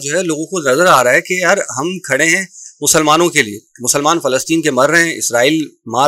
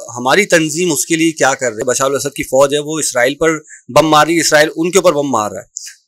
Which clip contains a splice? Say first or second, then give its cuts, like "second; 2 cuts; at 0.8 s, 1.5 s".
second; 1 cut; at 1.8 s